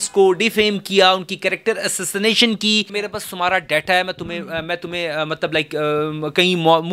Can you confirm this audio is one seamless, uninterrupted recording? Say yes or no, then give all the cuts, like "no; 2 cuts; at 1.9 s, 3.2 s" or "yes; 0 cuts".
no; 1 cut; at 2.9 s